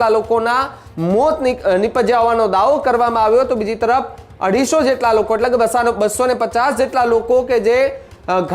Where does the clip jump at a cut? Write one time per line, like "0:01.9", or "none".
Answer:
none